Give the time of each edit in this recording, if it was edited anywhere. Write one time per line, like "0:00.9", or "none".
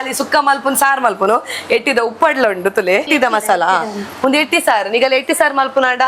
0:03.1